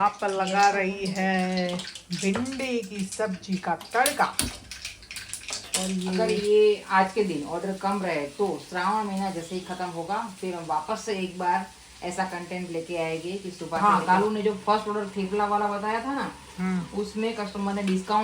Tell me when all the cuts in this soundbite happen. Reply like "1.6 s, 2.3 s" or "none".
6.2 s, 13.8 s